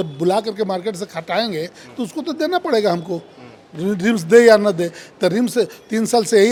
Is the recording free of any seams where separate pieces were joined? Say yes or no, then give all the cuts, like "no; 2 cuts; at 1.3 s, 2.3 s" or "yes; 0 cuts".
yes; 0 cuts